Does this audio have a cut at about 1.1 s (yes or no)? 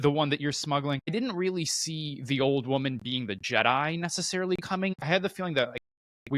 yes